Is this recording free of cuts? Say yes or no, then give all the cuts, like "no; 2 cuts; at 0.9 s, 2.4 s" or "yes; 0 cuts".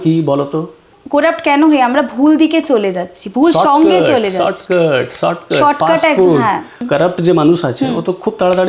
no; 2 cuts; at 0.9 s, 6.8 s